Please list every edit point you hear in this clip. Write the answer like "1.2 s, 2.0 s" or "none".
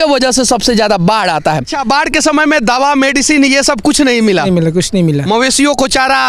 1.7 s